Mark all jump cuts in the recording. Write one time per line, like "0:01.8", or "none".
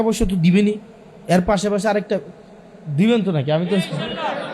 none